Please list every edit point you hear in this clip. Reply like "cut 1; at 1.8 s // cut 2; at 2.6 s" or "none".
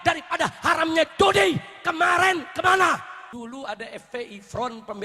cut 1; at 3.2 s